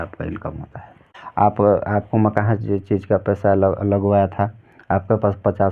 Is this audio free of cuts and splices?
yes; 0 cuts

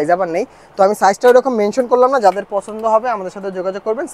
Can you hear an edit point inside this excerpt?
no; 0 cuts

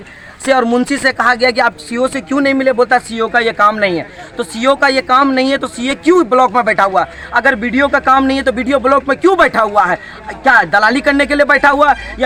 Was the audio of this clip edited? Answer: no; 0 cuts

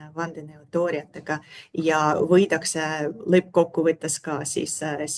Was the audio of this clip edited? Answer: no; 0 cuts

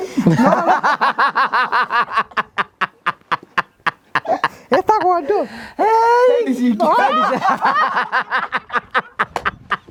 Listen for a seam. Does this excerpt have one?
no; 0 cuts

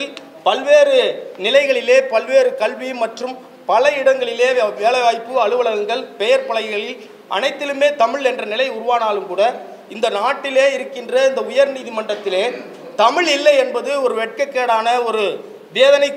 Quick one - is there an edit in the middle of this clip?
no; 0 cuts

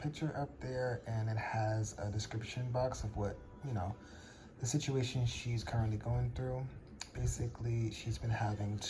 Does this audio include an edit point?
no; 0 cuts

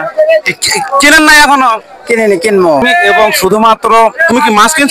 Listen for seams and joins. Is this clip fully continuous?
no; 1 cut; at 2.8 s

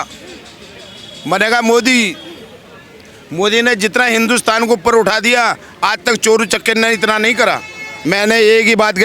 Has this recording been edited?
yes; 1 cut; at 7.9 s

